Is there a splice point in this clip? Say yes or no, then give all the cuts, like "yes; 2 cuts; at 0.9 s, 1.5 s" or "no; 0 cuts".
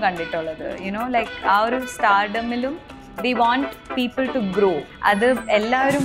yes; 1 cut; at 4.9 s